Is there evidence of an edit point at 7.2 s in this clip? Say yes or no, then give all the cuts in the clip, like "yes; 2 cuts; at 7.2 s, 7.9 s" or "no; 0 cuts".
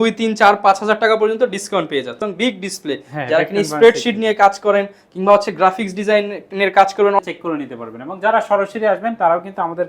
yes; 2 cuts; at 2.3 s, 7.2 s